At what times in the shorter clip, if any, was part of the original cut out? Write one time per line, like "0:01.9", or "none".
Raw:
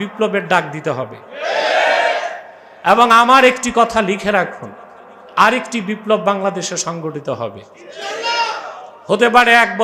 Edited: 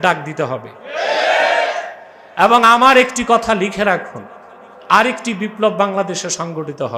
none